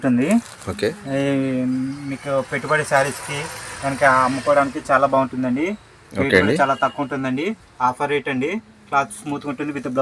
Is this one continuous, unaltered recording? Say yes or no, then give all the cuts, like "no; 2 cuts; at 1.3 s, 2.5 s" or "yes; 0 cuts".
yes; 0 cuts